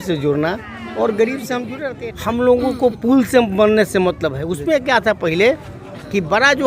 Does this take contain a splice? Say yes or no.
yes